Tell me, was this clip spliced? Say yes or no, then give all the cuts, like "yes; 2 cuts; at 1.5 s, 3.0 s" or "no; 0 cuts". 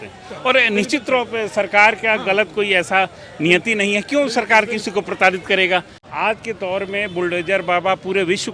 yes; 1 cut; at 6.0 s